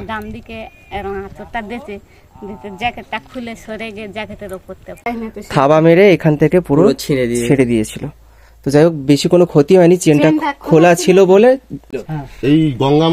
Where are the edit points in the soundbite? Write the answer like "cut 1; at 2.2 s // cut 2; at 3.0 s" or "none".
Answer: cut 1; at 5.1 s // cut 2; at 11.9 s